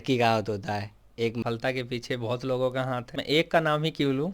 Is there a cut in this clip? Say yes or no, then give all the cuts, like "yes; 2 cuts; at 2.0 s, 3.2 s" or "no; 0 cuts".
yes; 2 cuts; at 1.4 s, 3.1 s